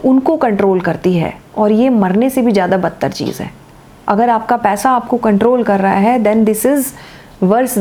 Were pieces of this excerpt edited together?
no; 0 cuts

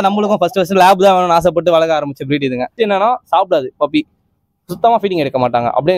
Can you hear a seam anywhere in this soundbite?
yes; 1 cut; at 2.7 s

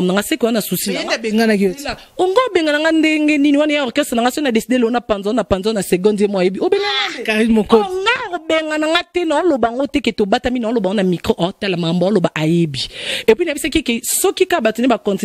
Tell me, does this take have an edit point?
no; 0 cuts

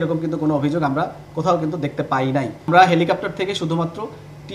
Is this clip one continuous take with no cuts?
no; 1 cut; at 2.7 s

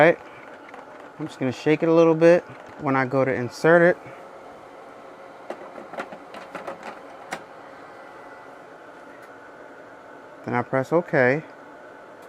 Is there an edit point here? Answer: yes; 1 cut; at 2.7 s

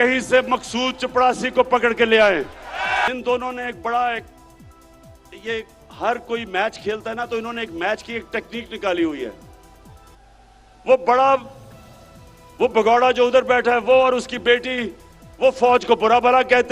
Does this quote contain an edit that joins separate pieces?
yes; 1 cut; at 3.0 s

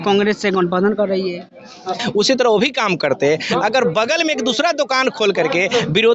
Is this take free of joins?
no; 1 cut; at 2.0 s

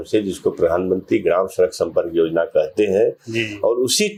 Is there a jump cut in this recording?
no; 0 cuts

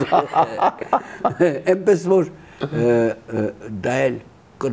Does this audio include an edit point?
no; 0 cuts

